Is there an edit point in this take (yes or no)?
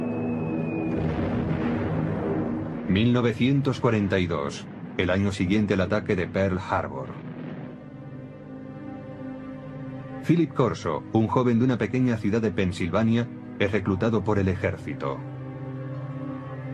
yes